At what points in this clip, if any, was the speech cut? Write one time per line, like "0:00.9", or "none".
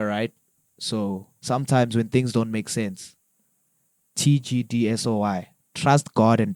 none